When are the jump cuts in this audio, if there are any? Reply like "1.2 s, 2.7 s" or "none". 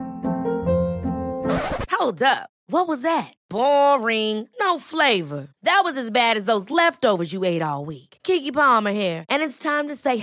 none